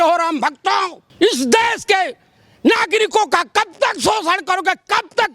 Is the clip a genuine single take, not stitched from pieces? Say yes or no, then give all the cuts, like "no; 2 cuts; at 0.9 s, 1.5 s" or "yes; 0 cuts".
no; 1 cut; at 1.0 s